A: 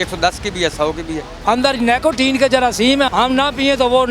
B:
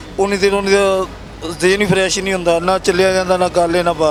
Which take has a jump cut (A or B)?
A